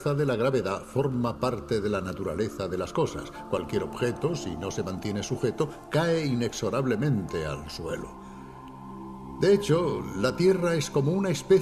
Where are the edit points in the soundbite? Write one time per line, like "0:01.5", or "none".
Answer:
0:03.1